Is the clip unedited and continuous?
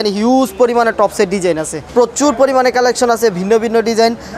no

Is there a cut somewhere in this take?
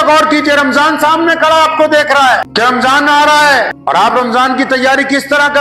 yes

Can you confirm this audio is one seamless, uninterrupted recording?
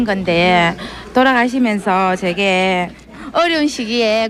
yes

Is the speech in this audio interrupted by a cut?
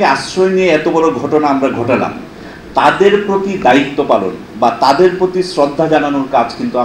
no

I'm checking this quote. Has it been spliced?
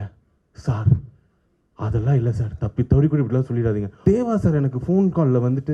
yes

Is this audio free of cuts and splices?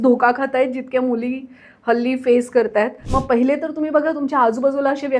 no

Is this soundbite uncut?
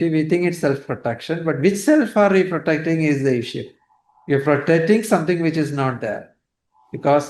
yes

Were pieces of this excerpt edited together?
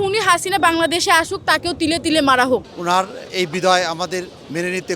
yes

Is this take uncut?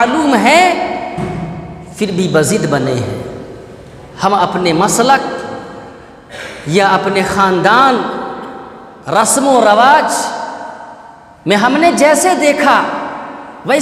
yes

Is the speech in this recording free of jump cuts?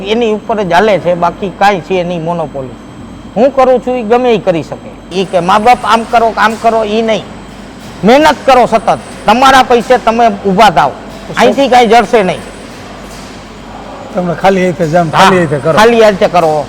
no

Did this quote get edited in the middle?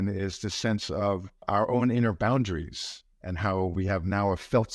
yes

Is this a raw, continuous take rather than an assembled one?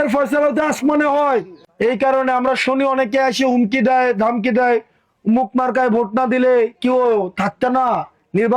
no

